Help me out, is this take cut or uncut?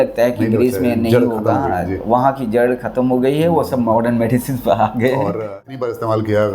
cut